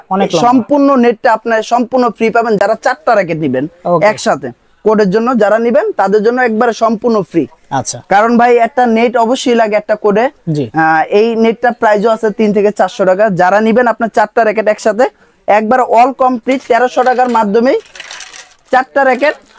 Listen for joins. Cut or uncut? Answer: uncut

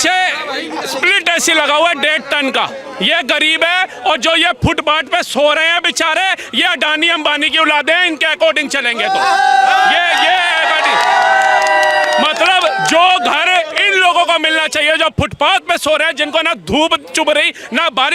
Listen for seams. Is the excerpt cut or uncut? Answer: uncut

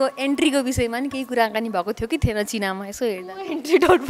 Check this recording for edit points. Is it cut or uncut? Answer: uncut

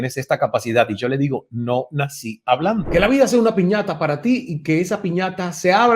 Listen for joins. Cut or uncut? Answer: cut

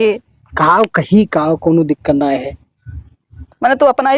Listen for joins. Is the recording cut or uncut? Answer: uncut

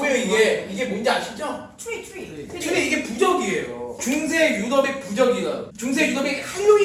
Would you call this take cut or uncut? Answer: cut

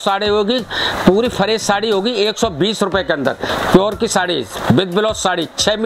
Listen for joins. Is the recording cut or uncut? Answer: cut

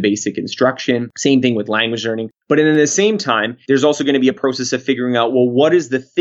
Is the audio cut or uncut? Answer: cut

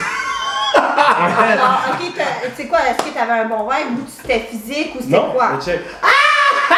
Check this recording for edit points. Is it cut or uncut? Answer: uncut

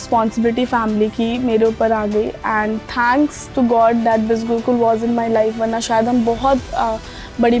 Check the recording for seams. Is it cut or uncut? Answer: uncut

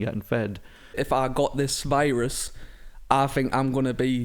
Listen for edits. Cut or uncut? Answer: cut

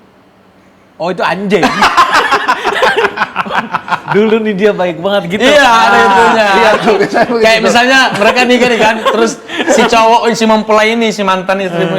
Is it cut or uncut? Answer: uncut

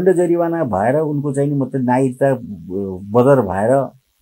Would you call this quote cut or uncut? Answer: uncut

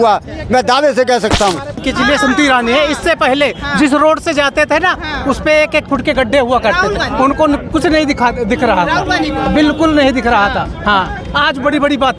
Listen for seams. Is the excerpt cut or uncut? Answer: cut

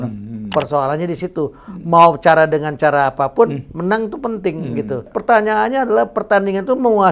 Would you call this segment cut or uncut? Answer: cut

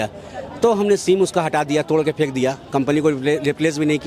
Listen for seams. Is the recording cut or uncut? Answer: uncut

